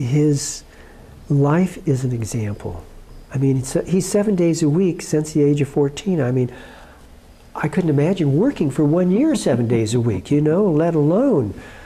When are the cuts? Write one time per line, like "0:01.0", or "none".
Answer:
none